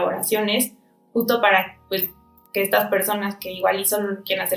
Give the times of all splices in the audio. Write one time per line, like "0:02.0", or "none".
none

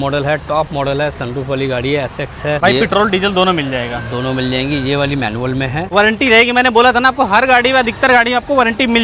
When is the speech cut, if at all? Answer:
0:02.6
0:05.9

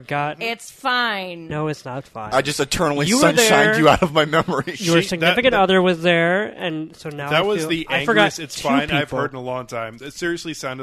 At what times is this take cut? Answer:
none

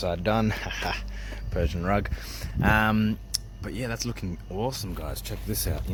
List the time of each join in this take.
none

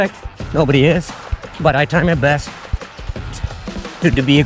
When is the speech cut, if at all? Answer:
none

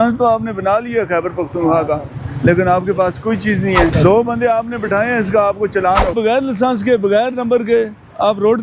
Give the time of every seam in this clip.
0:03.9
0:06.1

